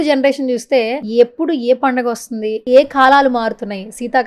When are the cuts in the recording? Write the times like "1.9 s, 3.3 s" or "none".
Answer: 1.0 s, 2.6 s